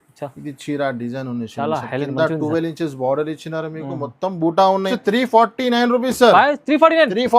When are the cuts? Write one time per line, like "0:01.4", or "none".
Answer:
0:04.9